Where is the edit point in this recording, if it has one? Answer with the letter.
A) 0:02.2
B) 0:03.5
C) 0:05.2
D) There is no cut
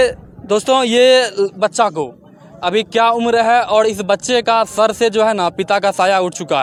D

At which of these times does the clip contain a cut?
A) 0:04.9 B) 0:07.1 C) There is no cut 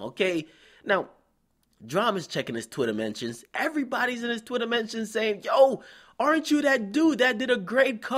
B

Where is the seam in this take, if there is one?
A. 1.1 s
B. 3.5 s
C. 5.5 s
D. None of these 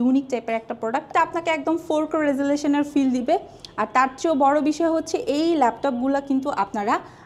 A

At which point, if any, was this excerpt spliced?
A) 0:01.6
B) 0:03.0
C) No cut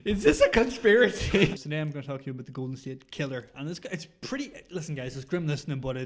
A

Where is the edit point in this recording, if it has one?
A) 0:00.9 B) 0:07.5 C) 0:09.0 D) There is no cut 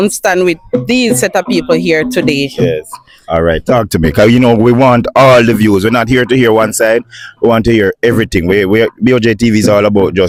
D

